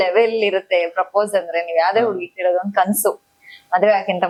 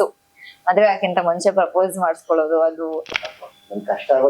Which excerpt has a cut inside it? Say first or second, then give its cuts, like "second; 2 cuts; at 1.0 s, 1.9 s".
second; 1 cut; at 3.1 s